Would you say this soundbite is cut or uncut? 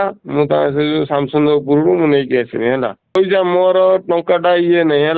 cut